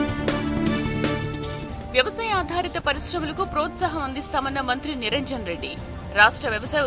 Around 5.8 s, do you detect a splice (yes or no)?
no